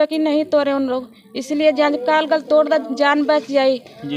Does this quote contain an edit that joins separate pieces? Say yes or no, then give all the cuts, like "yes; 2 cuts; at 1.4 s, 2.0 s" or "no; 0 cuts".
no; 0 cuts